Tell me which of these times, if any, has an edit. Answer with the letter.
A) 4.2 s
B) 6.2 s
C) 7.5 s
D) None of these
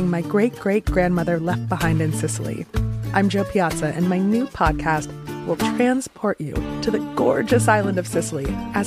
D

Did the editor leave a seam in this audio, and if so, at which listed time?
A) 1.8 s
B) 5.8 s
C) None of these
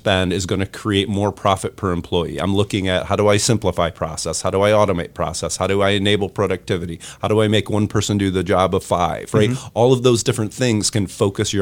C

